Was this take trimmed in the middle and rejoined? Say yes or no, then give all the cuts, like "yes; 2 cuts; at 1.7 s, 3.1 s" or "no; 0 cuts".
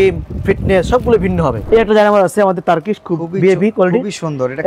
yes; 1 cut; at 1.6 s